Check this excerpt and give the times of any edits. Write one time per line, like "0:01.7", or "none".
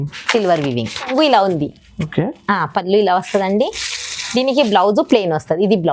0:01.1

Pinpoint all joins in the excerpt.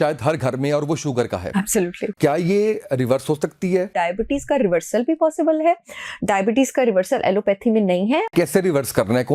0:02.1
0:03.9
0:08.3

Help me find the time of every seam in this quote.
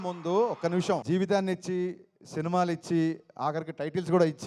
0:01.0

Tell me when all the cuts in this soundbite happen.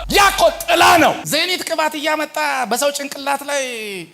0:01.2

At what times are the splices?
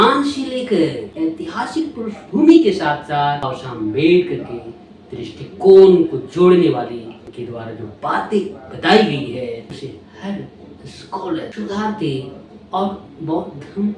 0:01.1
0:03.6
0:07.3
0:09.8
0:11.5

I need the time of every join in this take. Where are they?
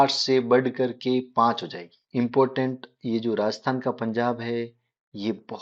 0:02.0

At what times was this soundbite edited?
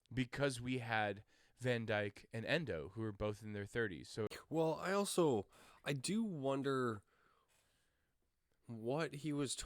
0:04.3

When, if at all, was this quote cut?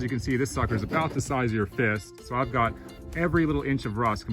0:02.1

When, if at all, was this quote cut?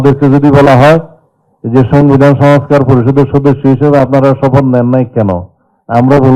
none

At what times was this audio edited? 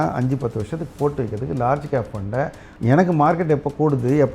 0:02.6

